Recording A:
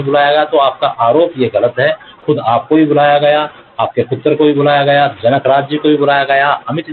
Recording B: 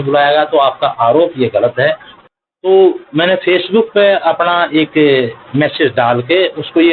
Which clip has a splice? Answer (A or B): B